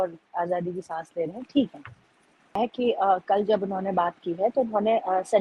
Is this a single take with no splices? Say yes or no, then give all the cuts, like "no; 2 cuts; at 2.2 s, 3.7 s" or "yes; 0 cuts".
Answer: no; 1 cut; at 2.6 s